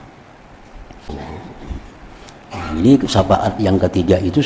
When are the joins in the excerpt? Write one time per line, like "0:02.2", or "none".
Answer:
0:01.1